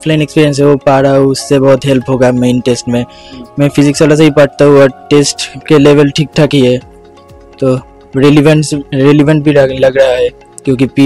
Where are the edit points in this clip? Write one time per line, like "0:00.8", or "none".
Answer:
none